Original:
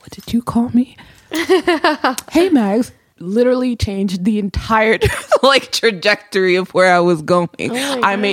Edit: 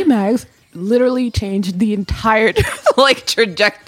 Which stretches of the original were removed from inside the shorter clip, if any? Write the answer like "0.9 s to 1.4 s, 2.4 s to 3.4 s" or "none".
none